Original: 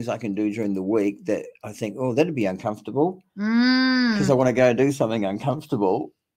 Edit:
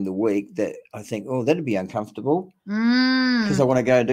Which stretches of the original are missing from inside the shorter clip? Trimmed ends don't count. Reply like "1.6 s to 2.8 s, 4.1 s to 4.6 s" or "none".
none